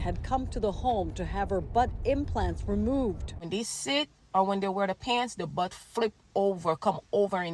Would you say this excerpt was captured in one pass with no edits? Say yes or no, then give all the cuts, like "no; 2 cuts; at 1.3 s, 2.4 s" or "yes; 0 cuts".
no; 1 cut; at 3.4 s